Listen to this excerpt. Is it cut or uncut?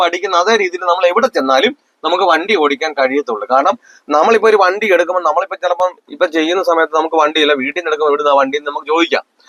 uncut